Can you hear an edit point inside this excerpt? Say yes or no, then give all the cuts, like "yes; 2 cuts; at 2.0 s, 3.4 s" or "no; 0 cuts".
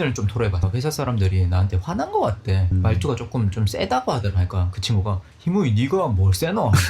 no; 0 cuts